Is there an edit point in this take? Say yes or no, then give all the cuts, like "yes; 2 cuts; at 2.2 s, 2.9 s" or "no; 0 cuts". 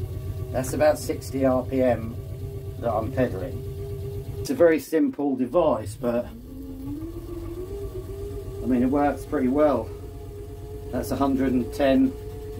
yes; 1 cut; at 4.3 s